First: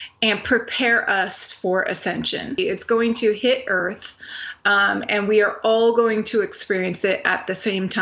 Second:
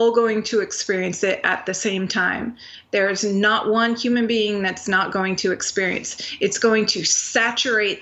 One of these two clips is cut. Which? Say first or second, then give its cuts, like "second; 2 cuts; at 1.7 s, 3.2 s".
first; 1 cut; at 2.6 s